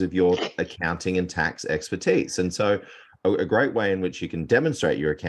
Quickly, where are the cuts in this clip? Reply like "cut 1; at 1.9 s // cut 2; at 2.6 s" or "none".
none